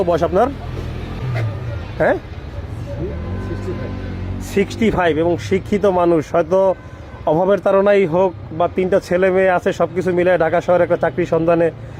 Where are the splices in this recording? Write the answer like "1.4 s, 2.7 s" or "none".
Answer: 1.2 s